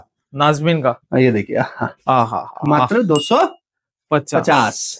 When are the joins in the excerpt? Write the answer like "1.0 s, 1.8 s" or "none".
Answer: none